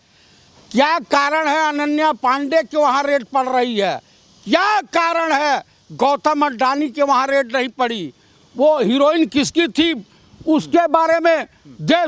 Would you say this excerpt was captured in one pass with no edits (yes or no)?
yes